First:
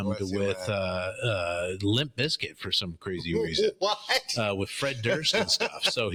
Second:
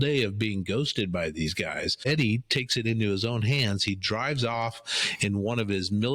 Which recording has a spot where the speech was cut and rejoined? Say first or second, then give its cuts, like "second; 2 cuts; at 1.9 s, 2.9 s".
second; 1 cut; at 2.0 s